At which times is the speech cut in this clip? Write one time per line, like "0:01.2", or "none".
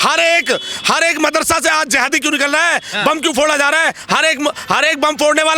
none